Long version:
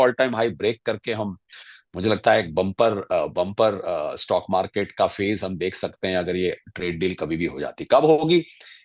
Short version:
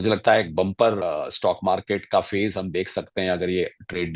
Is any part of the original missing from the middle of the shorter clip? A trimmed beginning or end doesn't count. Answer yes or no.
yes